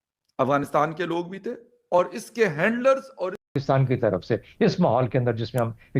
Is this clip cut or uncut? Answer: cut